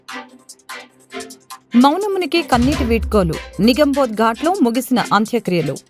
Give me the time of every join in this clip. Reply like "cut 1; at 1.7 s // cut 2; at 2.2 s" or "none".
cut 1; at 1.6 s